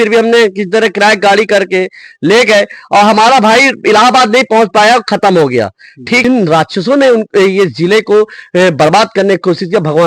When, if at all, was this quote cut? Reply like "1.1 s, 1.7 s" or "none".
6.2 s

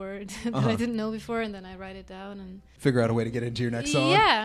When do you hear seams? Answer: 2.6 s

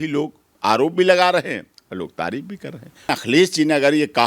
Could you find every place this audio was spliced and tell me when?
3.1 s

